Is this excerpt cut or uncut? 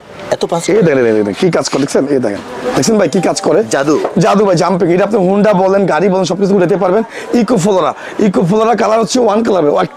uncut